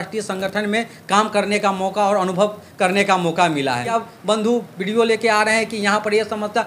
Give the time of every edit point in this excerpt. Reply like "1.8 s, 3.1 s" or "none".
3.9 s